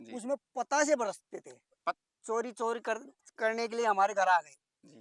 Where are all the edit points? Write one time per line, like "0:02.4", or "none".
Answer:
0:01.7